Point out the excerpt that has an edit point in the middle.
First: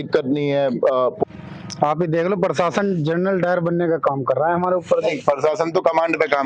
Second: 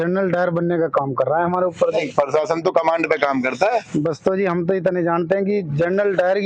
first; 1 cut; at 1.2 s

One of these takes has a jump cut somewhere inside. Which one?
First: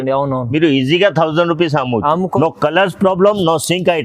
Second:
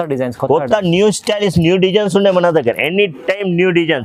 first; 1 cut; at 2.3 s

